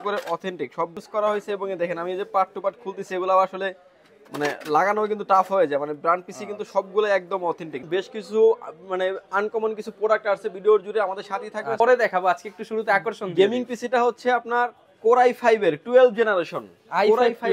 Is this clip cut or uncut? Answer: cut